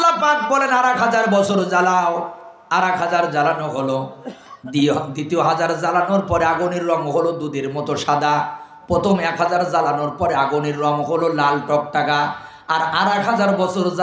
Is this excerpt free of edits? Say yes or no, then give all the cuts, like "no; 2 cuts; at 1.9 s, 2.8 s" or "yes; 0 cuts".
yes; 0 cuts